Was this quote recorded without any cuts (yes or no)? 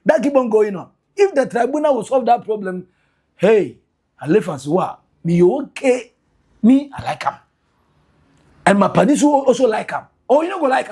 yes